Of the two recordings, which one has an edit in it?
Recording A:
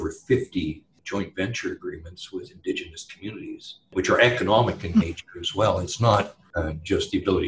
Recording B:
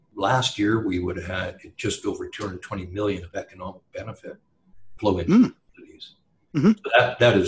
A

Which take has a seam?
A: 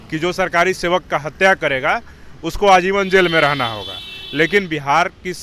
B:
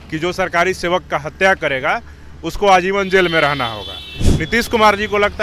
B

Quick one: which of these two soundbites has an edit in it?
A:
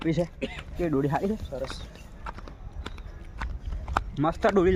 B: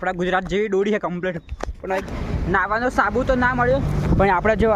B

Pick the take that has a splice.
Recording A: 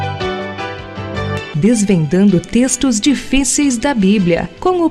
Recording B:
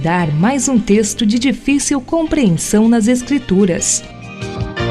B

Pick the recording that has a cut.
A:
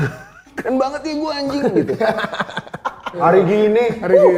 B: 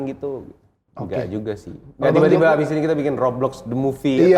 A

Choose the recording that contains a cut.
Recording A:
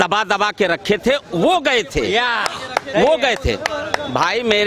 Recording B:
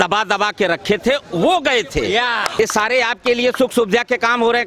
B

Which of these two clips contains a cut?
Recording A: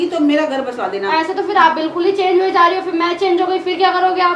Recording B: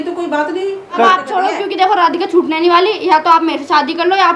B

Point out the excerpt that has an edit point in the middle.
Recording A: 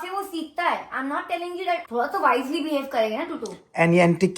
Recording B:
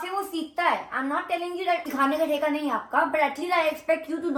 A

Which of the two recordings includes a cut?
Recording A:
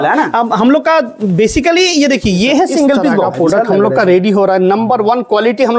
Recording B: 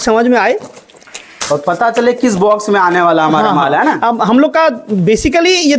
A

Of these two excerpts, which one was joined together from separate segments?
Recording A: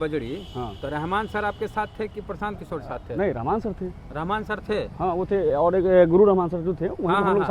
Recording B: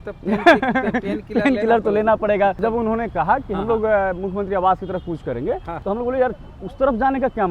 B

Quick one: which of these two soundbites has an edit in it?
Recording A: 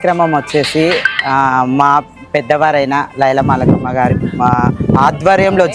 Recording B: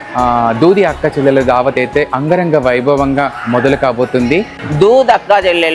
B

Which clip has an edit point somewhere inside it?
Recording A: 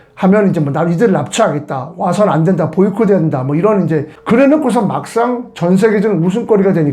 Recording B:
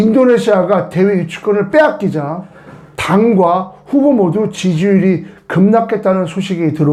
A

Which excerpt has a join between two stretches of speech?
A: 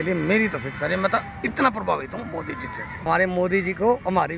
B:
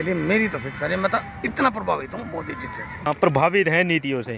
A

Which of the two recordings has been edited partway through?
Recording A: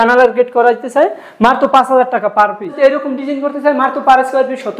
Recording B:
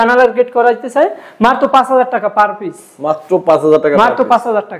A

